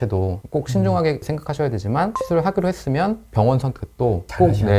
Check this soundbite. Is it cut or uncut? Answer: uncut